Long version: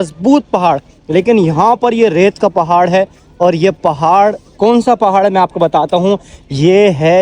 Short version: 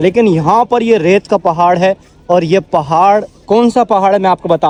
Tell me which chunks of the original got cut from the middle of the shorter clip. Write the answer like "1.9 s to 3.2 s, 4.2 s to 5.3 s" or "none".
none